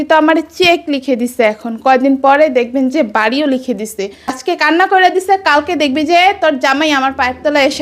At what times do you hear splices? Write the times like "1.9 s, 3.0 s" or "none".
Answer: 4.3 s